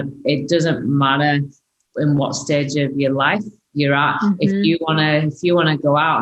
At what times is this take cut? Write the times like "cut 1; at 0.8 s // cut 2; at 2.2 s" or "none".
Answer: cut 1; at 1.7 s